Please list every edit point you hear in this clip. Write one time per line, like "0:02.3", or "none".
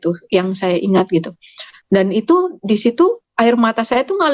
none